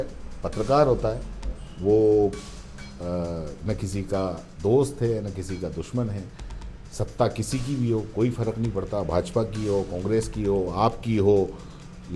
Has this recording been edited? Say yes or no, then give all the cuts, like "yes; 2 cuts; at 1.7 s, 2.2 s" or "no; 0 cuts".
no; 0 cuts